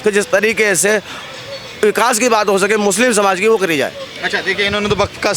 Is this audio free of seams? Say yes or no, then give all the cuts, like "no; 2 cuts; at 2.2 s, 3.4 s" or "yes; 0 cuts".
yes; 0 cuts